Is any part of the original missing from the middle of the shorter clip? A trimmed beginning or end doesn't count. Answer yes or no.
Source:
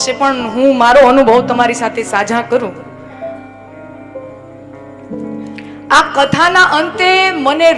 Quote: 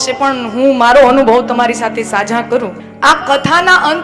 yes